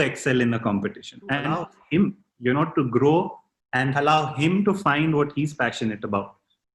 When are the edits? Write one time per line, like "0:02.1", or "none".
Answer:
0:01.7